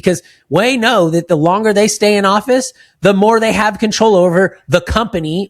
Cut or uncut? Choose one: uncut